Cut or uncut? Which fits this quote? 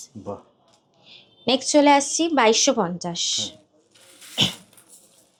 uncut